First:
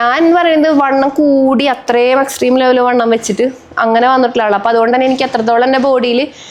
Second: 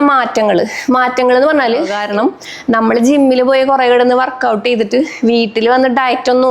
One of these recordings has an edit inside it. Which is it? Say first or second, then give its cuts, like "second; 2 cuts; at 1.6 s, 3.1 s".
second; 1 cut; at 2.0 s